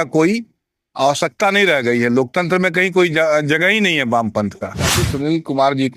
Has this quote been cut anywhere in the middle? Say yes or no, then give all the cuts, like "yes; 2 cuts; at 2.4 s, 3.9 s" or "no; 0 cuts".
yes; 1 cut; at 5.0 s